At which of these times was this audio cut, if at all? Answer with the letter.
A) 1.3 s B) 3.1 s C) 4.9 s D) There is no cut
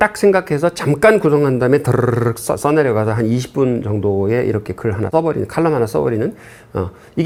D